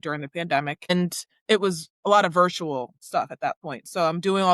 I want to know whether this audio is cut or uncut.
cut